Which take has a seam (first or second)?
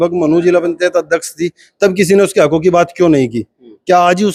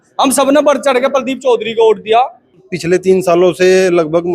second